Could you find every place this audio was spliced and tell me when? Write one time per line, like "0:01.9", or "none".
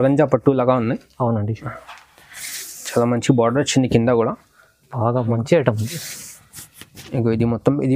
none